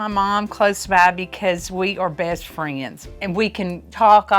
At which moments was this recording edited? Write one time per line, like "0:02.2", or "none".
0:03.0